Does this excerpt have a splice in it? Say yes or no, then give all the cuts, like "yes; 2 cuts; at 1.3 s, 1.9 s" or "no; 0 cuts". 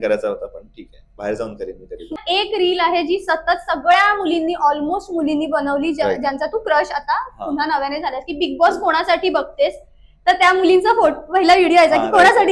yes; 1 cut; at 2.2 s